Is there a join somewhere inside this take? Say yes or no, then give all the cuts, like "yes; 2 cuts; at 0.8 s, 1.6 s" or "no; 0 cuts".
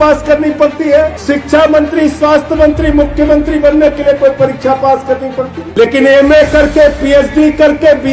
yes; 2 cuts; at 1.2 s, 5.6 s